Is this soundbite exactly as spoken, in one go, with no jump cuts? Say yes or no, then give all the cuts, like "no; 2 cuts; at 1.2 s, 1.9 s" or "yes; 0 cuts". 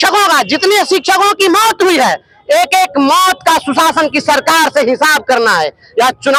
yes; 0 cuts